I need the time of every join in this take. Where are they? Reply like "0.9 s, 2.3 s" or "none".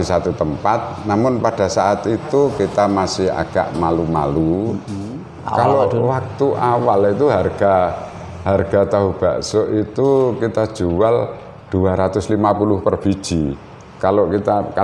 4.9 s